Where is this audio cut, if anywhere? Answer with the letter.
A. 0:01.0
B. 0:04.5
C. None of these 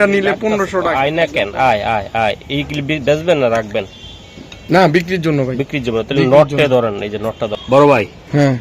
A